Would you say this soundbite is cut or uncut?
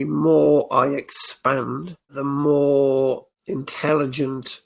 cut